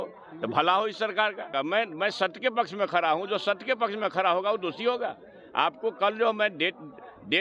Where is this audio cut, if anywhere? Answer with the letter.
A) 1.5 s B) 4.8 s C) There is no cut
A